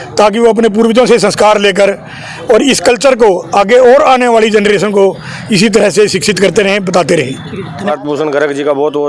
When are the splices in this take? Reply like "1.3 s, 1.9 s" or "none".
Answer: 7.9 s